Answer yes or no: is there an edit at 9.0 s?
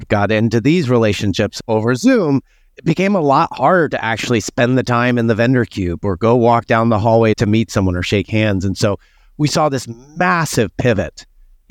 no